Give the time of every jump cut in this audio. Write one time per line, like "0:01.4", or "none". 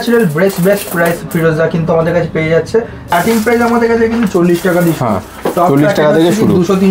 0:03.1

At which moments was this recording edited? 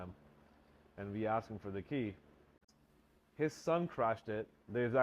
0:02.5

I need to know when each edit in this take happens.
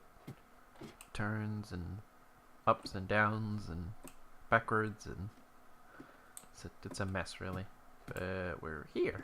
0:03.1

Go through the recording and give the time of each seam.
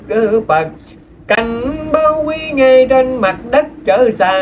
none

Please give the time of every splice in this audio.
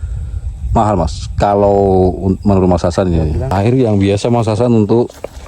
0:03.5

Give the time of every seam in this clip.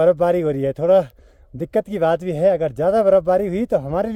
none

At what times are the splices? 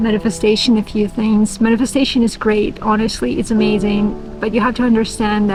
none

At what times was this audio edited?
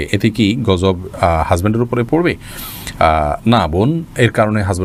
none

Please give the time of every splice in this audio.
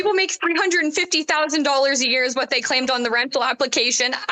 none

